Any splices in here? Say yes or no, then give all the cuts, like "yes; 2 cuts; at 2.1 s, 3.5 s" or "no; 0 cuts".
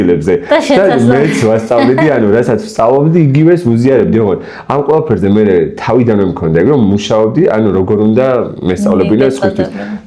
no; 0 cuts